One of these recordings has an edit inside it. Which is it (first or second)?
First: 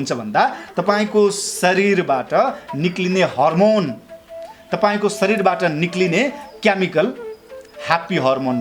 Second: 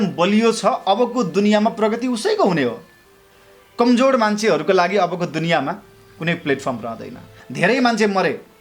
second